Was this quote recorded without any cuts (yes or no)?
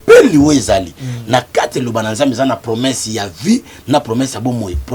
yes